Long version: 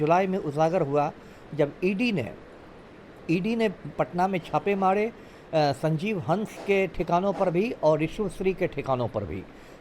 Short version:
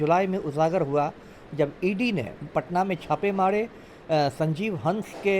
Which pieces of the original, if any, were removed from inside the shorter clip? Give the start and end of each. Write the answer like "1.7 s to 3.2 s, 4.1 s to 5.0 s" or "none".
2.4 s to 3.8 s